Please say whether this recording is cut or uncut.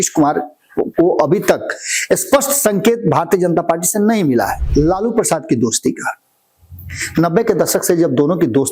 cut